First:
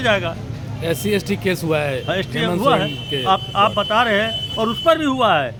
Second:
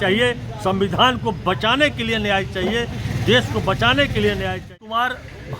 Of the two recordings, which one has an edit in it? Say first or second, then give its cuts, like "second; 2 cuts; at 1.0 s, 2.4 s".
second; 1 cut; at 4.6 s